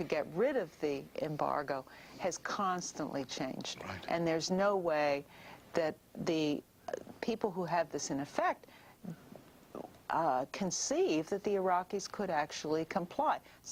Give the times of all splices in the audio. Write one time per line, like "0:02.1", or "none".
none